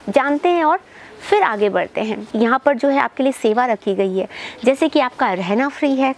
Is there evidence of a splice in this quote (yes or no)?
yes